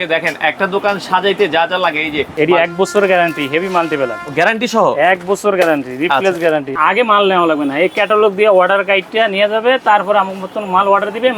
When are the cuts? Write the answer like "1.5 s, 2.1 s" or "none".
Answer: 2.3 s, 6.8 s